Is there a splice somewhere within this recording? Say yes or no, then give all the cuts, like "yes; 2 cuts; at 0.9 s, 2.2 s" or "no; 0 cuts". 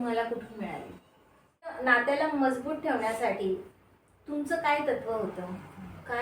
yes; 1 cut; at 1.8 s